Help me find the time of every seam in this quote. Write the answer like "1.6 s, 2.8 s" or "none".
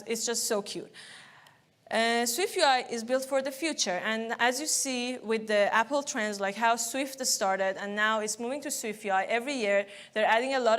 none